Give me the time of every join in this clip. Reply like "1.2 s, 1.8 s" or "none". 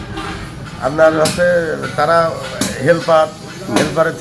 none